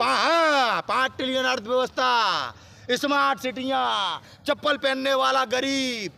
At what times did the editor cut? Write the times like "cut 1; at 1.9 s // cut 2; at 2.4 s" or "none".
none